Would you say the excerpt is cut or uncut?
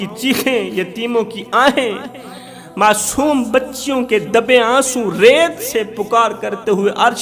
uncut